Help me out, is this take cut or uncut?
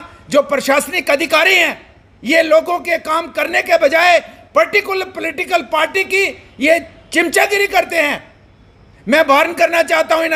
uncut